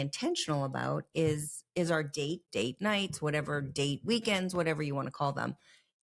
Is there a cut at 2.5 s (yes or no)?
yes